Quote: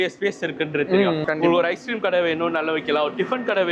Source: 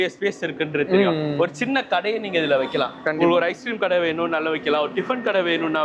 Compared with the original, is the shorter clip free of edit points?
no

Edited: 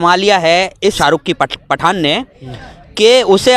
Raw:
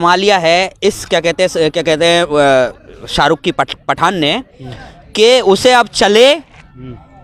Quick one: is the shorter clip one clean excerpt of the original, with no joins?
no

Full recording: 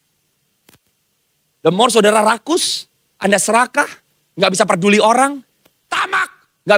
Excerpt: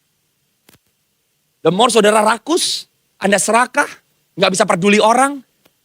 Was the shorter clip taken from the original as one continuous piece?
yes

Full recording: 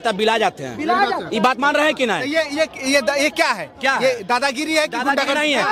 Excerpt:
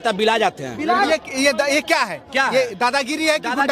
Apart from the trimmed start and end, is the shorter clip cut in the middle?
yes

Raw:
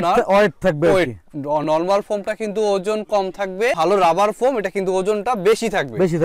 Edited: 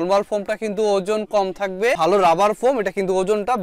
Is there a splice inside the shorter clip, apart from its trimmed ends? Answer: no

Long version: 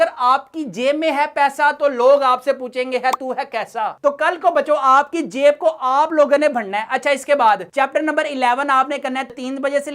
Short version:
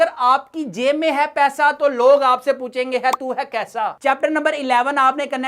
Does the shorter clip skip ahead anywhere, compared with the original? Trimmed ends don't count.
yes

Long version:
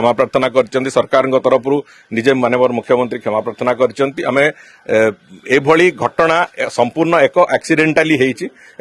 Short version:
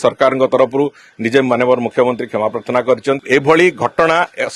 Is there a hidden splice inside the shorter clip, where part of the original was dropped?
yes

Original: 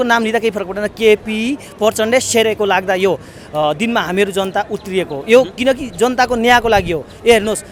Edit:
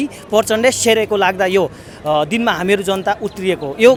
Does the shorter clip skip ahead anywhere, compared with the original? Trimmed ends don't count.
no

